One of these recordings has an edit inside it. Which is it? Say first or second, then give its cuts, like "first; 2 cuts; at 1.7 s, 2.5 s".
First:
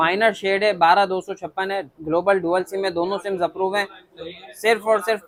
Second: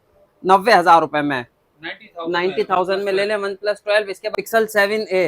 second; 1 cut; at 4.3 s